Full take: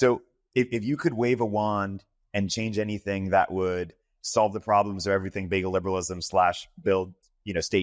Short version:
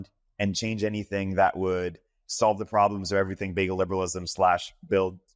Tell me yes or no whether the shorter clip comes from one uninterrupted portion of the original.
yes